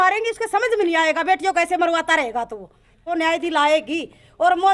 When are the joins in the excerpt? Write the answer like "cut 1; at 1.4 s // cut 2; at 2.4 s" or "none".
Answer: cut 1; at 3.0 s